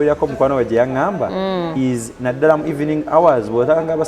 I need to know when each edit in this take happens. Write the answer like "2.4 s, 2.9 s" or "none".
none

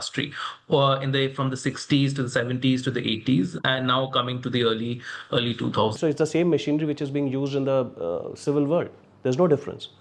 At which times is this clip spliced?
5.9 s

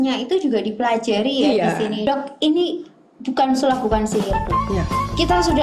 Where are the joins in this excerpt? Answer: 2.0 s

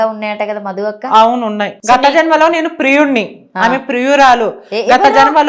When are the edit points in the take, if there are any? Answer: 1.8 s

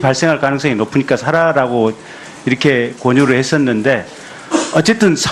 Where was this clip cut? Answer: 2.4 s

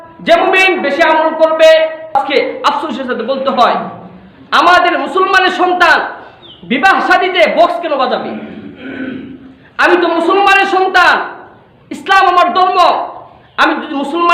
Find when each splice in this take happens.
2.2 s

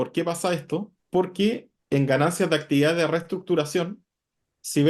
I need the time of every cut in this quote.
1.0 s, 1.7 s

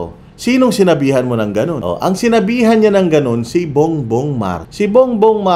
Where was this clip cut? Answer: 1.8 s, 4.6 s

